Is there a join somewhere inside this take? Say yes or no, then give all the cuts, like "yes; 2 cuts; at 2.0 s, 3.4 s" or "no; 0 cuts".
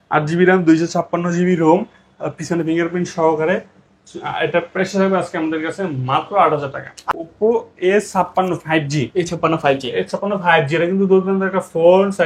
yes; 1 cut; at 7.0 s